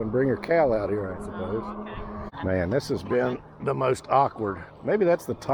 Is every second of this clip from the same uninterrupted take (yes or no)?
no